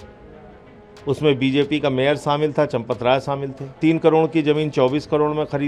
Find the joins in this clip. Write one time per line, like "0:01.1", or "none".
0:03.8